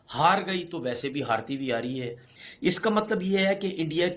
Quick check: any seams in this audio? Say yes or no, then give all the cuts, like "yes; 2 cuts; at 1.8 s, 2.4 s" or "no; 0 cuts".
no; 0 cuts